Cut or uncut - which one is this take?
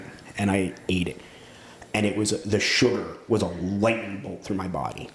uncut